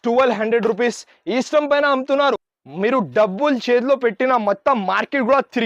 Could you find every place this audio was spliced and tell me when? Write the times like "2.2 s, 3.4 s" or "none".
2.6 s